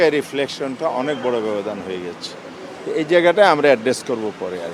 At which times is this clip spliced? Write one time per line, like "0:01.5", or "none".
none

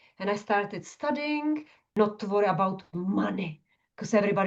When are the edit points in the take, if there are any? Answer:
0:01.8

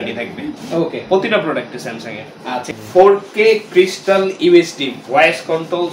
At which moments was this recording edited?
0:02.7

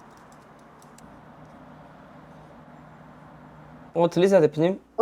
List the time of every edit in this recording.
0:01.0
0:03.9

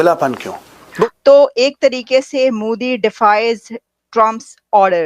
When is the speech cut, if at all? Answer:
0:01.1

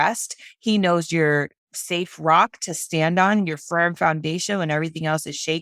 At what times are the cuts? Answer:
none

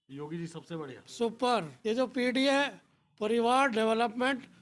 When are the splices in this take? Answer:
0:01.7

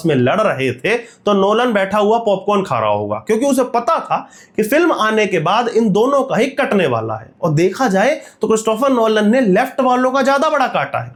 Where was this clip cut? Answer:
none

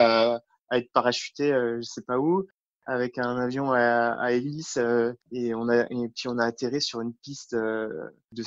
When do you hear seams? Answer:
none

